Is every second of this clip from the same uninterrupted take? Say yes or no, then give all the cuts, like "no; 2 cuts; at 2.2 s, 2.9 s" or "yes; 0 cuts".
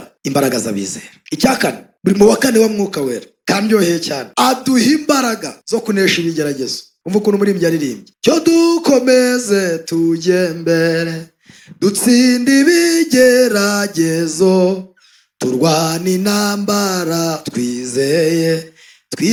yes; 0 cuts